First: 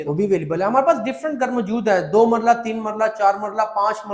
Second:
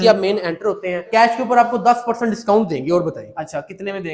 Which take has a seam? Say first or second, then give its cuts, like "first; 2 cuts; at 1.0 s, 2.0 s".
second; 1 cut; at 1.1 s